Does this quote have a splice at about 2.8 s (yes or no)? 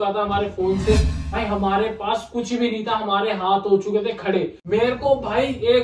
no